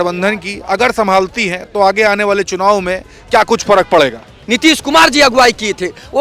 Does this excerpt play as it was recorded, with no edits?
no; 1 cut; at 4.4 s

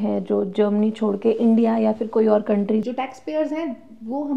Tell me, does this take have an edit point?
yes; 1 cut; at 2.9 s

